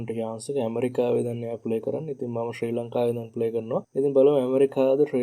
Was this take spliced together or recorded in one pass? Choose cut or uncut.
cut